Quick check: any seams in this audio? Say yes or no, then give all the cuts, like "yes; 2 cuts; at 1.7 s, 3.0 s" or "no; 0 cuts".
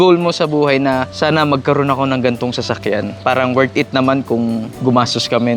yes; 3 cuts; at 1.1 s, 3.2 s, 4.7 s